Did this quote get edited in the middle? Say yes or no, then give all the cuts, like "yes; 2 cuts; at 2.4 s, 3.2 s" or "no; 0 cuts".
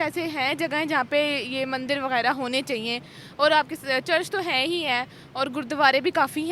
no; 0 cuts